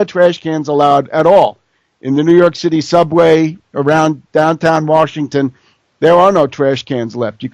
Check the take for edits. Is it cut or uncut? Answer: uncut